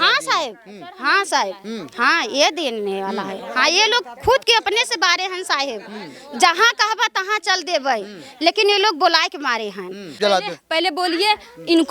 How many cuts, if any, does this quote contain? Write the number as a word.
one